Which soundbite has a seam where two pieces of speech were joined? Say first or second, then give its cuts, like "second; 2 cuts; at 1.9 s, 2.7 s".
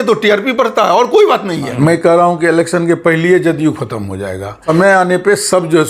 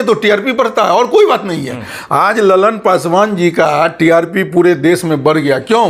first; 2 cuts; at 1.7 s, 4.6 s